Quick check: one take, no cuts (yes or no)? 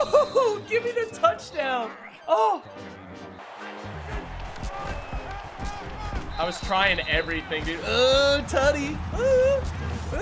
yes